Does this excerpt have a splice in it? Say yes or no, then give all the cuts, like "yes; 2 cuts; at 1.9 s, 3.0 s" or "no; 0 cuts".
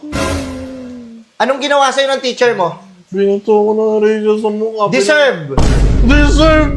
no; 0 cuts